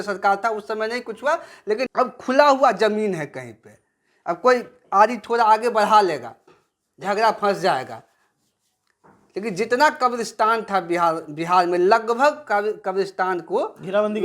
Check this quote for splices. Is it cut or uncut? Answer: cut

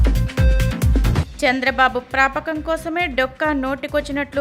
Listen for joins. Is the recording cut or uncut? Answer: cut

